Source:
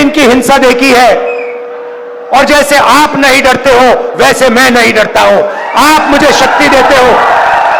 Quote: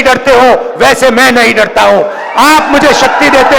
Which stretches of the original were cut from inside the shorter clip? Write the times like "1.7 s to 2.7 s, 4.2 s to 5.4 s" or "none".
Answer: none